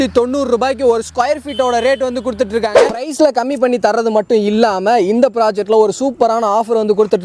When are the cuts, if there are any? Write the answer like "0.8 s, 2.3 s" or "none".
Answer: 2.9 s